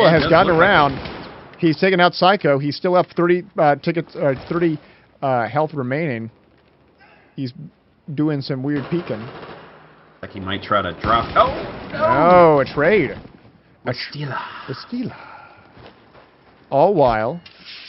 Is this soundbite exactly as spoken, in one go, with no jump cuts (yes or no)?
no